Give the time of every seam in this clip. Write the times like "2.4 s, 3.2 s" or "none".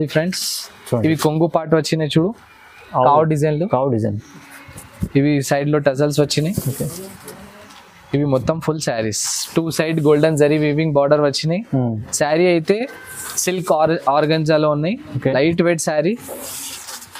none